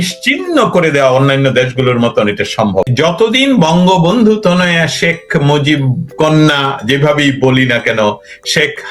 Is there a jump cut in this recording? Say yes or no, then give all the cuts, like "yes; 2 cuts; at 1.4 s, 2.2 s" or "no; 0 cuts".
yes; 1 cut; at 2.9 s